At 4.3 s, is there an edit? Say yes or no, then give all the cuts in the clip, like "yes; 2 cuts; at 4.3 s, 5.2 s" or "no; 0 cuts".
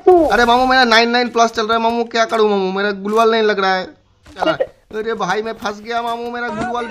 yes; 1 cut; at 4.3 s